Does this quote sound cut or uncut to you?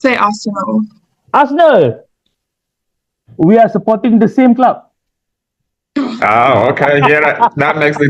uncut